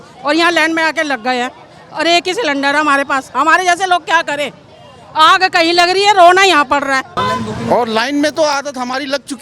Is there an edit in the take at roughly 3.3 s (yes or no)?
no